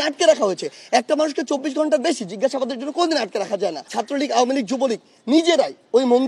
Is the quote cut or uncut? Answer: cut